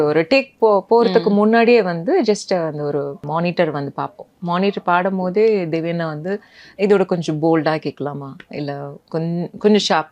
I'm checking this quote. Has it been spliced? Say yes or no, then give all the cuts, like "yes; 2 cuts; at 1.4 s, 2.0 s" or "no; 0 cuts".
yes; 1 cut; at 3.2 s